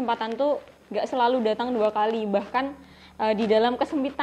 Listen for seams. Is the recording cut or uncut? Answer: uncut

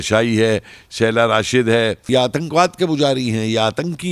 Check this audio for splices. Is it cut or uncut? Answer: cut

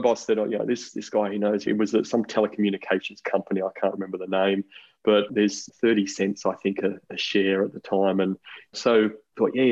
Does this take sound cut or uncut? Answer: uncut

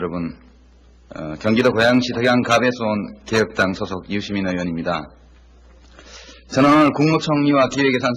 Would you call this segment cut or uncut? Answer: uncut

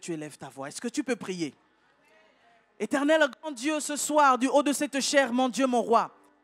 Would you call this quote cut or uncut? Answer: uncut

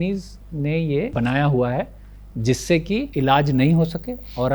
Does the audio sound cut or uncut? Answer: cut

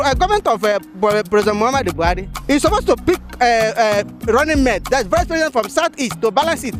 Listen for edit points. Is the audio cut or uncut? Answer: cut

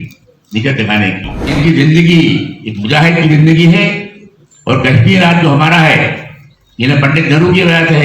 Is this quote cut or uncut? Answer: cut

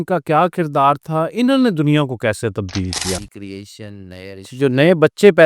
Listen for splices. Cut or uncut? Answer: cut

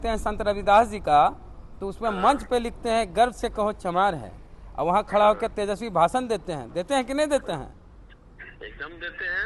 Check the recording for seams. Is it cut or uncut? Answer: uncut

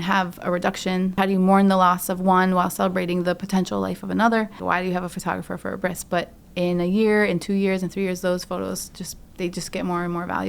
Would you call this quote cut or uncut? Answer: cut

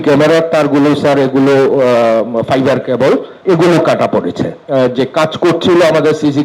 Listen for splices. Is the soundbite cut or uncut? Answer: cut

